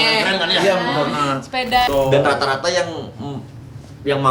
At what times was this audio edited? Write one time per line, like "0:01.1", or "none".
0:01.9